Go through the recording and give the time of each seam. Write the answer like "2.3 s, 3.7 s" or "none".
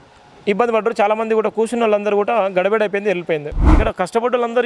3.7 s